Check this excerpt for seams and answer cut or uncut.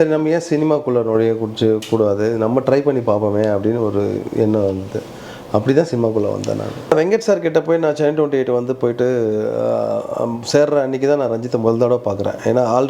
cut